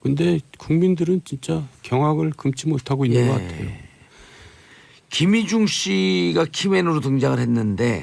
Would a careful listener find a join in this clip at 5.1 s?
no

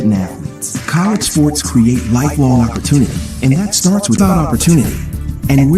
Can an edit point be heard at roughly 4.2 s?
yes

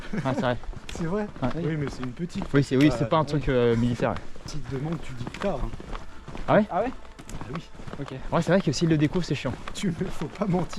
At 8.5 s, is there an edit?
no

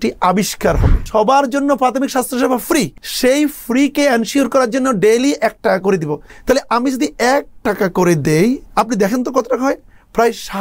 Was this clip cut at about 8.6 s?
yes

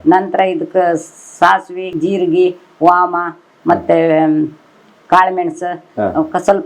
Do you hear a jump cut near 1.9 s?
yes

